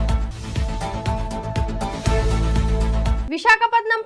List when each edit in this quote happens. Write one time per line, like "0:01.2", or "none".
0:03.2